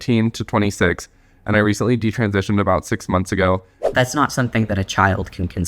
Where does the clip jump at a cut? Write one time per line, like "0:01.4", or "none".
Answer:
0:03.8